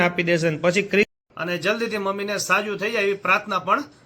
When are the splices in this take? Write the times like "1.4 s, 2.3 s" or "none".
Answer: 1.1 s